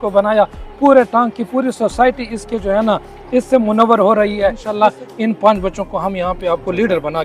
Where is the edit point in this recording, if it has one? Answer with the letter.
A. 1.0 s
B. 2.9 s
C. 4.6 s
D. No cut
C